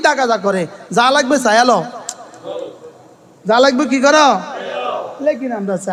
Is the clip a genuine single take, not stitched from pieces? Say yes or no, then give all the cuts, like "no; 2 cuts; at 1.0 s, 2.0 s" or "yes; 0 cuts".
yes; 0 cuts